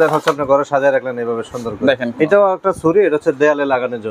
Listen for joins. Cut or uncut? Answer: cut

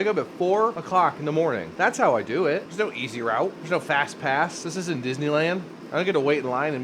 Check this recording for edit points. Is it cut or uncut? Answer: cut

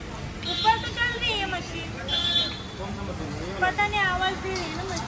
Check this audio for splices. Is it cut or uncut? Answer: uncut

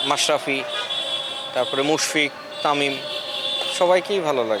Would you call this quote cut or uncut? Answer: uncut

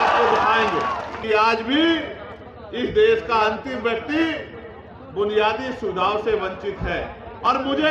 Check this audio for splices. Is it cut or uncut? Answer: cut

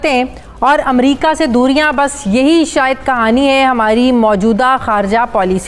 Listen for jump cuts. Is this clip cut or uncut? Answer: uncut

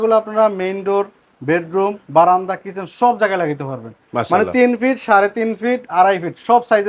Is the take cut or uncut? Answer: uncut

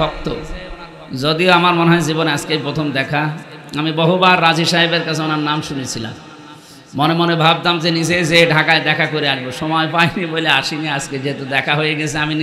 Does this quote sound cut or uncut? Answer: uncut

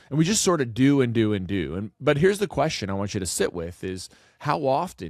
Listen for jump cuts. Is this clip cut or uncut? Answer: uncut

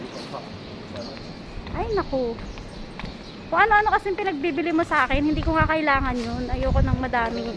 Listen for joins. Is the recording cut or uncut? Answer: uncut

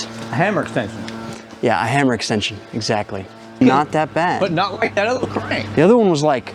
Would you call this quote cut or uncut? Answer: cut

